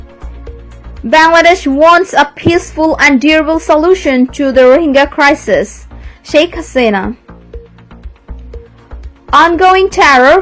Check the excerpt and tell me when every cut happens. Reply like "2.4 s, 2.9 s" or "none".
7.7 s, 9.3 s